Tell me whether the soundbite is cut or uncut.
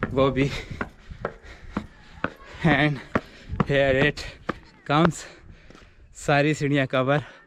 uncut